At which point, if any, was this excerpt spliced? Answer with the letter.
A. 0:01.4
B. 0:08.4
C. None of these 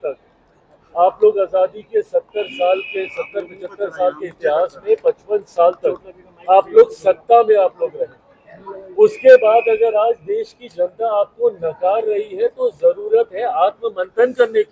C